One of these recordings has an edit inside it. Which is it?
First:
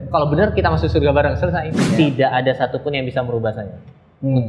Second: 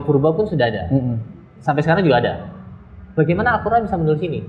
first; 1 cut; at 1.9 s

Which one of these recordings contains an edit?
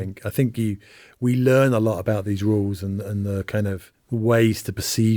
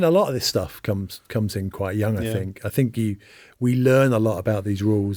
first; 1 cut; at 3.9 s

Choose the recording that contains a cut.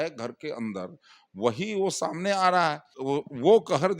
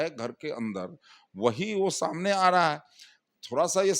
first; 1 cut; at 2.9 s

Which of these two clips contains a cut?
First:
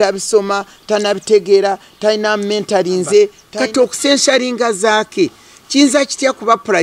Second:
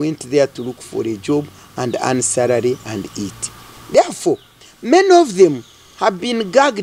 first; 1 cut; at 3.4 s

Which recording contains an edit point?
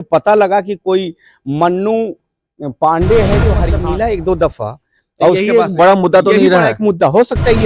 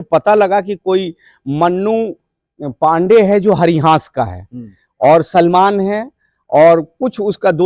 first; 1 cut; at 3.7 s

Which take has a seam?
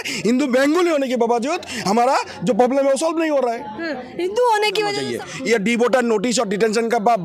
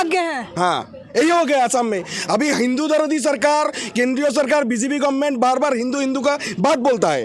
first; 1 cut; at 5.0 s

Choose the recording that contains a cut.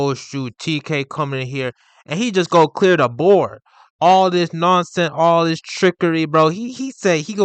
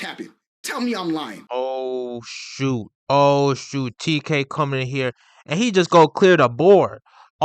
second; 1 cut; at 1.4 s

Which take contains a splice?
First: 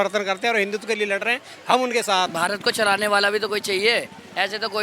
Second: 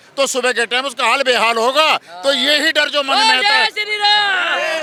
first; 1 cut; at 2.3 s

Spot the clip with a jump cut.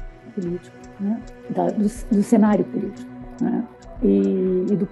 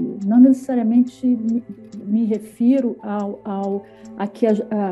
first; 2 cuts; at 1.3 s, 3.8 s

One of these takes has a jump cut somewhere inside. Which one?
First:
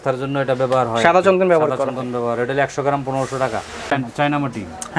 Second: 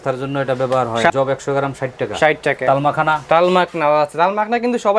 second; 2 cuts; at 1.1 s, 2.6 s

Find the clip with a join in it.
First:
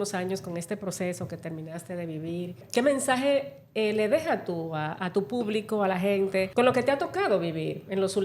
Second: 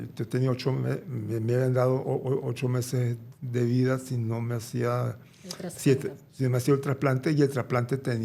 first; 2 cuts; at 2.6 s, 6.5 s

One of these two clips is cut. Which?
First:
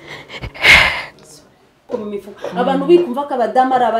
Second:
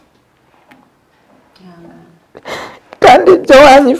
first; 1 cut; at 1.9 s

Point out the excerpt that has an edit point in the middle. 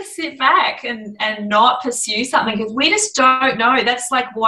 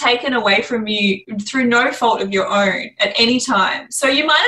second; 1 cut; at 1.3 s

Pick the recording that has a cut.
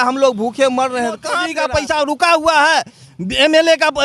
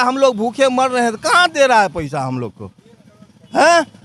first; 1 cut; at 1.4 s

